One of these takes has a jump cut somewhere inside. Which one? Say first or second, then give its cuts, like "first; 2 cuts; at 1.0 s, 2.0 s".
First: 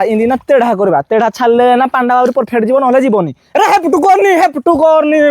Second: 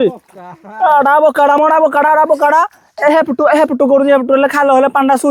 first; 1 cut; at 3.4 s